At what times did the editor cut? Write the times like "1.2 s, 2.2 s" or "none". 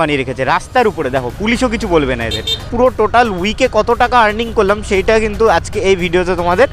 2.7 s